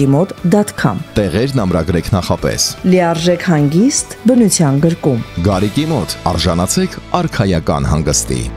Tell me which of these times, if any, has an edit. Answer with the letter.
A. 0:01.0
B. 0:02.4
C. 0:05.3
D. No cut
A